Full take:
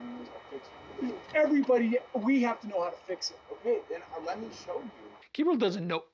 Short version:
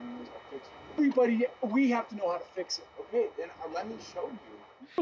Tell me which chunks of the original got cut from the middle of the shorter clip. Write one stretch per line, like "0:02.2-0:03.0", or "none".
0:01.0-0:01.5